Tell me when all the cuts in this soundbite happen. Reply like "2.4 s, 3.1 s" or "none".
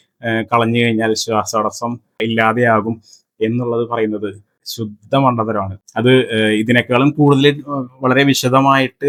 none